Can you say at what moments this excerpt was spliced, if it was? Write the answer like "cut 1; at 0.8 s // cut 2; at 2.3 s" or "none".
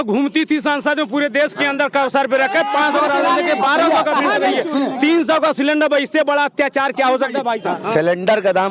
cut 1; at 7.8 s